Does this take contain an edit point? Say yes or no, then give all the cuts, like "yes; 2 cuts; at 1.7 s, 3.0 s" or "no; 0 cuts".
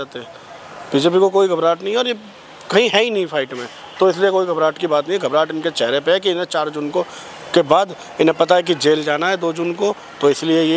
no; 0 cuts